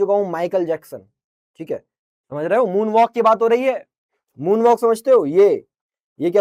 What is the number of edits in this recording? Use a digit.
0